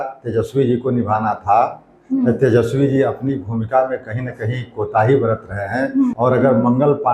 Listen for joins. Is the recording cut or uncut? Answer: cut